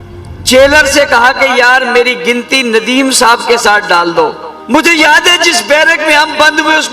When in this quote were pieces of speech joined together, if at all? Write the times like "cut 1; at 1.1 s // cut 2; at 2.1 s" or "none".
cut 1; at 4.5 s